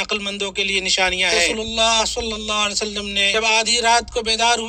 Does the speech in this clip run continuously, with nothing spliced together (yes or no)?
no